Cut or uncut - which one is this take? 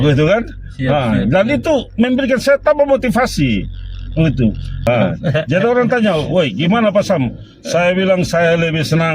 cut